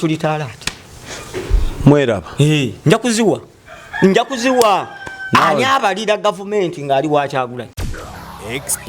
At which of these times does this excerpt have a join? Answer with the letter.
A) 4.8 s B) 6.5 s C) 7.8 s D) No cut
C